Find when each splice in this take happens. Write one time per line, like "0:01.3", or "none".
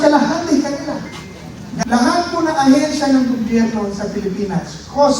0:01.8